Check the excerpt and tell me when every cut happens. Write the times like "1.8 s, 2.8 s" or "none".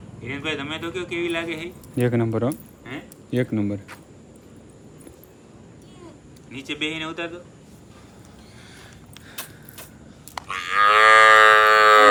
none